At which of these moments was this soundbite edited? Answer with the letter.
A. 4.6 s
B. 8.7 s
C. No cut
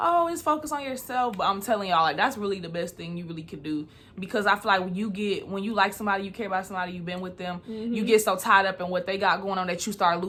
C